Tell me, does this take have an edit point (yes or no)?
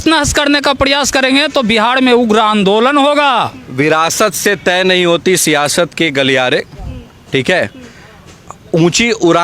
yes